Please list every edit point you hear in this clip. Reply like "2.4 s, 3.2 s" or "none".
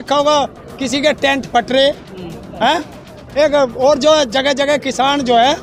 none